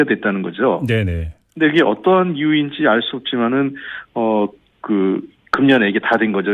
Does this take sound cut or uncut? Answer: cut